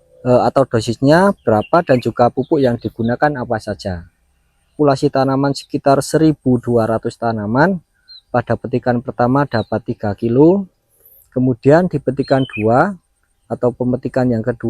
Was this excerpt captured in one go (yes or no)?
no